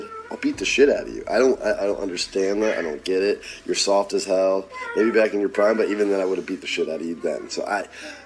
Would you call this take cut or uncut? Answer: uncut